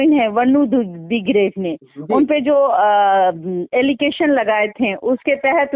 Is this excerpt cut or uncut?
uncut